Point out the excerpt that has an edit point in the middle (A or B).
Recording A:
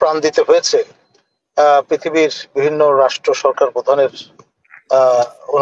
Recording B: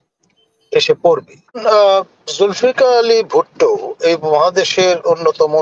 B